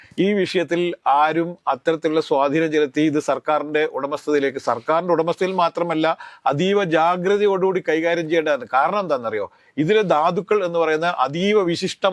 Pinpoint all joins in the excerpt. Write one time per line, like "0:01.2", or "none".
none